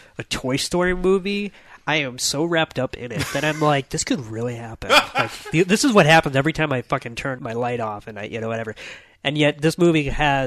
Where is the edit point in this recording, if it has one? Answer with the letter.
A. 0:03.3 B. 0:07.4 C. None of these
B